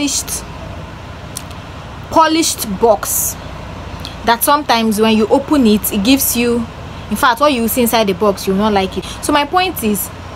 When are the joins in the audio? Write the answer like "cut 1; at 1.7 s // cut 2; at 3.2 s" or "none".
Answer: cut 1; at 9.0 s